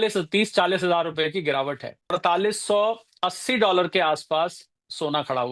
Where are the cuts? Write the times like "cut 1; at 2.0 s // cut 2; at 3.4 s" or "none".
cut 1; at 2.2 s